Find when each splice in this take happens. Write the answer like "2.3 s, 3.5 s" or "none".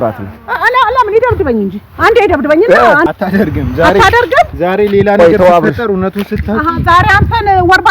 3.0 s